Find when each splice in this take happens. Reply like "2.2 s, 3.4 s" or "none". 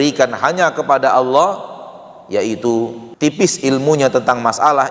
3.0 s